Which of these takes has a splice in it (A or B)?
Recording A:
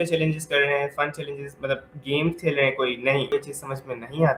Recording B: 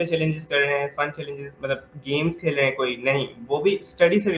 A